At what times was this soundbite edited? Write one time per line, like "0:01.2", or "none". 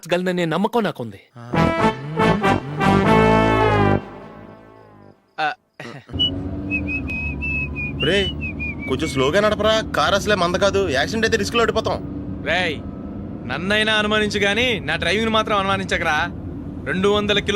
0:06.1